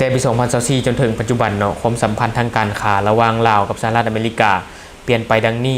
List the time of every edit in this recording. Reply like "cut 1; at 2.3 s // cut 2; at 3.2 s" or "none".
none